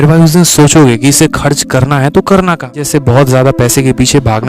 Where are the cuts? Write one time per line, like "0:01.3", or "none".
0:02.9